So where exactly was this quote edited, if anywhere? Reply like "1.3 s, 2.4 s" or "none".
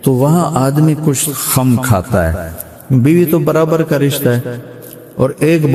none